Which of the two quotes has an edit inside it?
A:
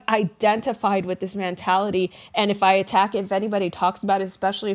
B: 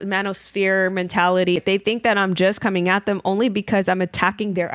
B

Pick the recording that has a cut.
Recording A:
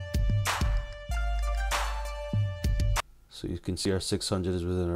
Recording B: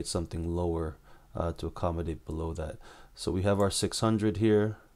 A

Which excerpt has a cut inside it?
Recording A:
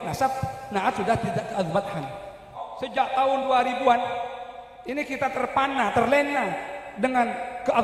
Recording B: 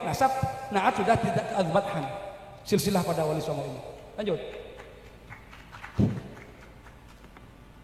A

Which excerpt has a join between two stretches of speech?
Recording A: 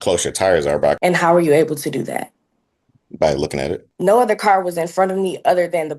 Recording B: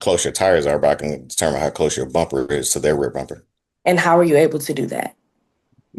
A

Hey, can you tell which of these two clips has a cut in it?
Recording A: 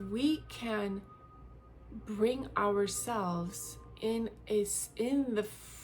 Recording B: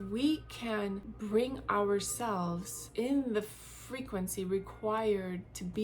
B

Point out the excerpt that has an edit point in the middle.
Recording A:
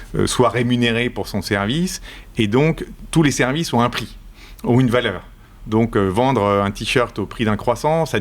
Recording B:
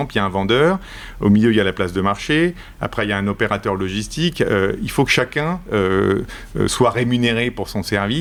A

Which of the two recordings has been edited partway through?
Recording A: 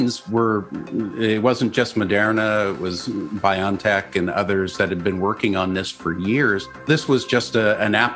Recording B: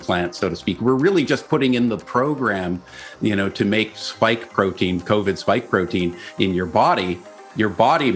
A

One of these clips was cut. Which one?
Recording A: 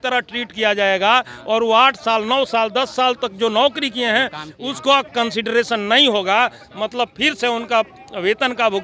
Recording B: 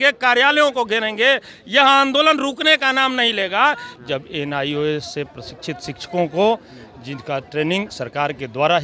B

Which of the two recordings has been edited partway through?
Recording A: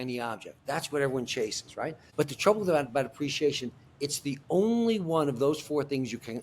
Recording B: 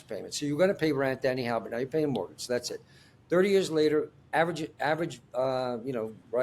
A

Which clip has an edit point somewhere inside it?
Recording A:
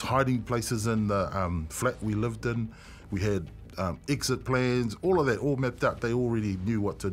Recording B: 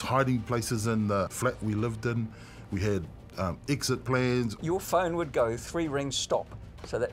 B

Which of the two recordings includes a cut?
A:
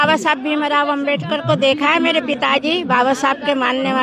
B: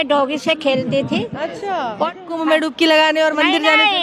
B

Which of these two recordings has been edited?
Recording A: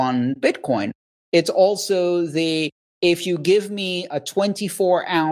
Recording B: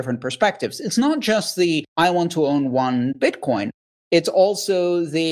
B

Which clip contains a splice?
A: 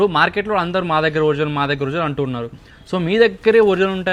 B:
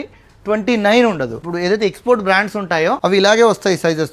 B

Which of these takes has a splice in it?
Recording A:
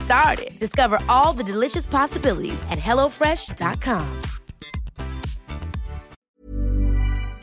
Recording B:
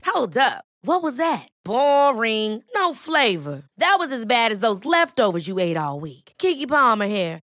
A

